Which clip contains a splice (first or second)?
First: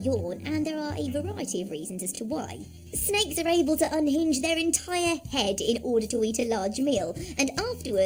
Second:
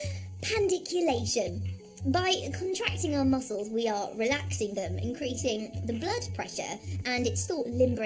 first